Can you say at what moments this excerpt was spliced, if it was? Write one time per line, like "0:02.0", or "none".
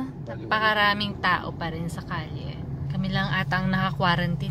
0:02.8